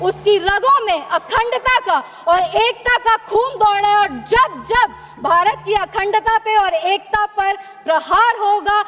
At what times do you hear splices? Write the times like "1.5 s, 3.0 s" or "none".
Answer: none